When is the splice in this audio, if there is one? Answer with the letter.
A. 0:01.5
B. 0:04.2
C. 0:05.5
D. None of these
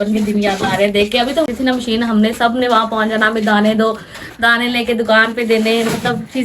A